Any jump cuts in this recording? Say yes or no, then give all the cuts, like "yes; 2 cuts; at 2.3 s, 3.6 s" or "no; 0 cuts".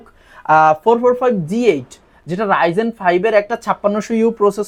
no; 0 cuts